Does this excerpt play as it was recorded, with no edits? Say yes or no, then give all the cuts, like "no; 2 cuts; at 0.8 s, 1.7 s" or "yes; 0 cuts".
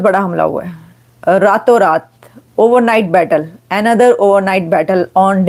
yes; 0 cuts